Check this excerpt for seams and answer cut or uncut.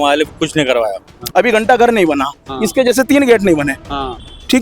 cut